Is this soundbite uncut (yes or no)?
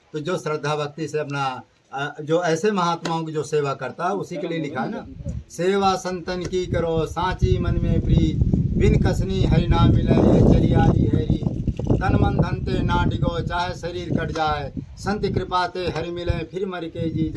yes